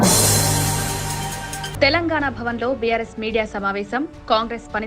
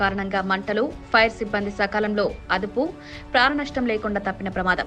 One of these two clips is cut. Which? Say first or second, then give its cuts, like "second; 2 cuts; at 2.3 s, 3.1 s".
first; 1 cut; at 1.3 s